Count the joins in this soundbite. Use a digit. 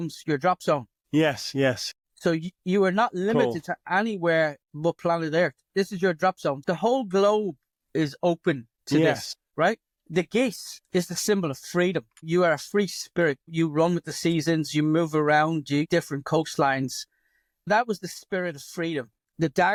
0